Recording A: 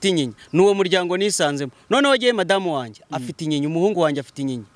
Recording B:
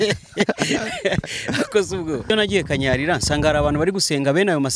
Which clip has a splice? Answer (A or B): B